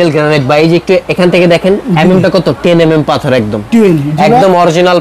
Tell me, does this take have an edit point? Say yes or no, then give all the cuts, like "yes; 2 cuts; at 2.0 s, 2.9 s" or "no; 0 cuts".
no; 0 cuts